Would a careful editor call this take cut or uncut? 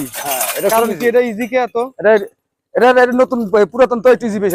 uncut